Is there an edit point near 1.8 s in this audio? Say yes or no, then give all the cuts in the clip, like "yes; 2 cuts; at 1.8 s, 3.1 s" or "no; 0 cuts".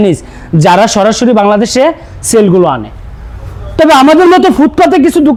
no; 0 cuts